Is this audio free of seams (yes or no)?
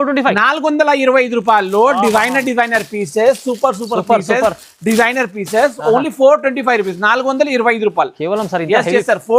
yes